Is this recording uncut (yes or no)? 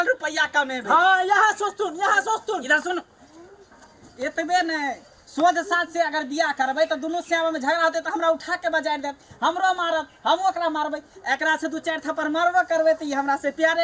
yes